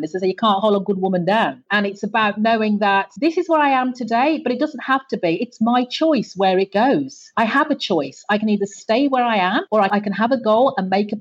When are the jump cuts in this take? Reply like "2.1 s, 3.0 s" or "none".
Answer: 7.2 s, 9.9 s